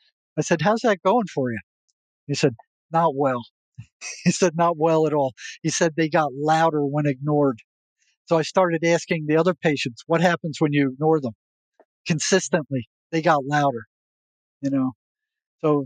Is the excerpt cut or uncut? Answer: uncut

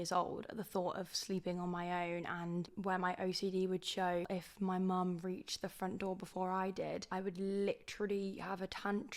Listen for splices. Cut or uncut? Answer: cut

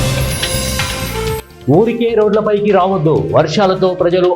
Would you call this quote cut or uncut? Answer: cut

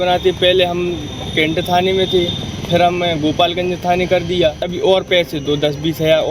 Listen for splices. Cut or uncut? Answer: cut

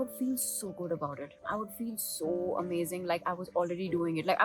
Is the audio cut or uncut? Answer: uncut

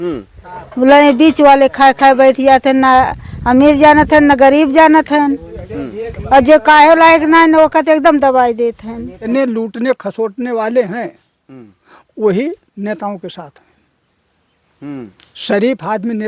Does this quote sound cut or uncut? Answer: cut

